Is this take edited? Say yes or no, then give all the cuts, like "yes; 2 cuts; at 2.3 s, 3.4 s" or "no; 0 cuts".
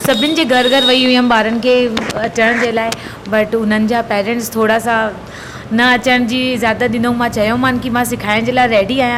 no; 0 cuts